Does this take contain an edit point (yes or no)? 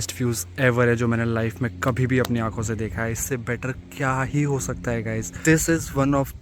yes